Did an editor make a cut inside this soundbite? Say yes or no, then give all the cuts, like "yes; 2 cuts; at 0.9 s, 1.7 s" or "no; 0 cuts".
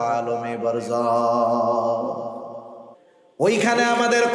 yes; 1 cut; at 2.8 s